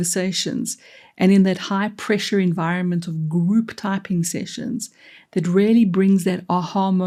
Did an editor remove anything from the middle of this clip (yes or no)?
no